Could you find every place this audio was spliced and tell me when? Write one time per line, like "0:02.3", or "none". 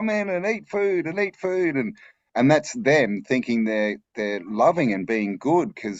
none